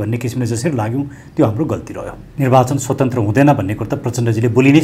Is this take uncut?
no; 1 cut; at 2.2 s

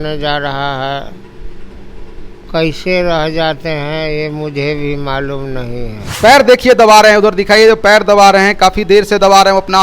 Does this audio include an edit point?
yes; 1 cut; at 6.1 s

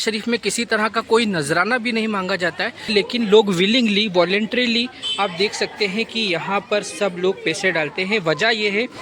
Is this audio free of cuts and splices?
no; 1 cut; at 2.9 s

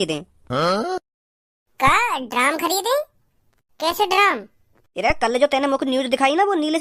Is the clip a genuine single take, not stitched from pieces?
yes; 0 cuts

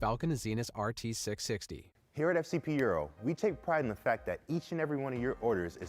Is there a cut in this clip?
yes; 1 cut; at 1.8 s

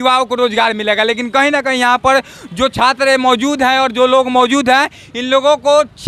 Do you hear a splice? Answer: no; 0 cuts

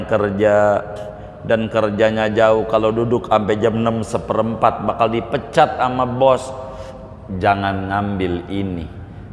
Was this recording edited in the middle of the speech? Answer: no; 0 cuts

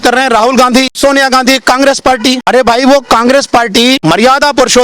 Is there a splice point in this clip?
yes; 3 cuts; at 0.9 s, 2.4 s, 4.0 s

